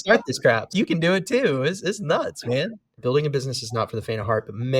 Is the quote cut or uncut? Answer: cut